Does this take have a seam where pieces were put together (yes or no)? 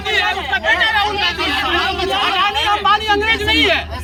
no